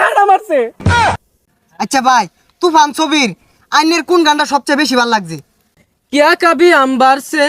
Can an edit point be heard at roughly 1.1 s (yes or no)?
yes